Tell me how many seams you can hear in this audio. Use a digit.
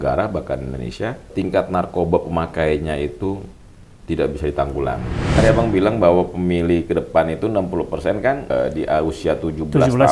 3